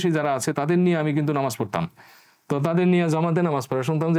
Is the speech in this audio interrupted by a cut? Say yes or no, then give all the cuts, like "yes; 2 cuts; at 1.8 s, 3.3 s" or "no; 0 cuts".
no; 0 cuts